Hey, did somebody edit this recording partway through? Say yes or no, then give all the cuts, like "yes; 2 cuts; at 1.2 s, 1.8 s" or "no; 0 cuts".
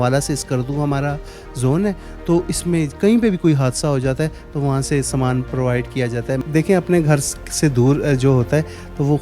yes; 1 cut; at 6.4 s